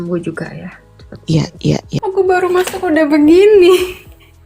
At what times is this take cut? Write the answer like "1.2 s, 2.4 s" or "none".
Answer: 2.0 s